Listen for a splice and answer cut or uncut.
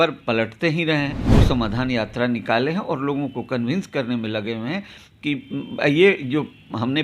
cut